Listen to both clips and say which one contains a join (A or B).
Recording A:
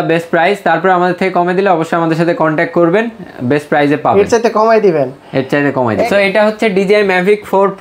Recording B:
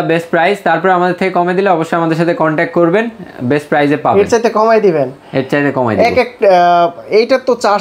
A